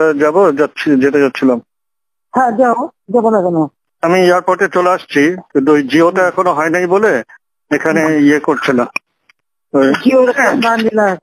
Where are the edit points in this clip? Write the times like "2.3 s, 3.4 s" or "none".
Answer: 3.9 s